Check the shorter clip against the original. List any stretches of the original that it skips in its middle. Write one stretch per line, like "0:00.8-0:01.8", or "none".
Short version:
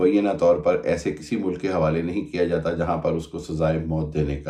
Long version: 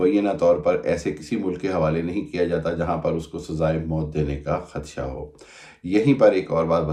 none